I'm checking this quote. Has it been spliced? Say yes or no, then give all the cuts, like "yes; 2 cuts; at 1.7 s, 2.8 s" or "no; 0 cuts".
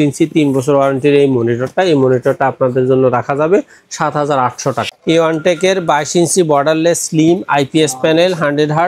yes; 1 cut; at 4.8 s